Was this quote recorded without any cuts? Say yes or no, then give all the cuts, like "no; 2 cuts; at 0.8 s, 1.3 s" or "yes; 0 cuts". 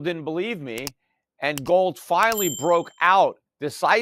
yes; 0 cuts